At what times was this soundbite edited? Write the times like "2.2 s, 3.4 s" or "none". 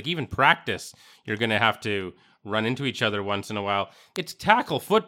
4.1 s